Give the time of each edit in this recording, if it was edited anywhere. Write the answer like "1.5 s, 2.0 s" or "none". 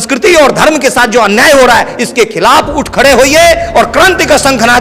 none